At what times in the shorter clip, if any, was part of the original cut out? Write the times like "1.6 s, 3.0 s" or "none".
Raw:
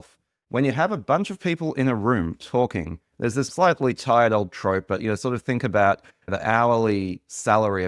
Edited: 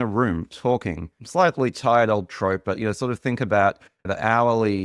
1.3 s